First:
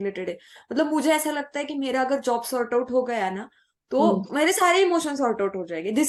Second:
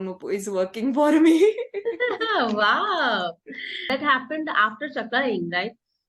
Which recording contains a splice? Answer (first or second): second